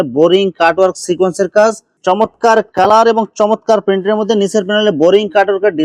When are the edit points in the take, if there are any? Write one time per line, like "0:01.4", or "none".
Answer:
0:01.9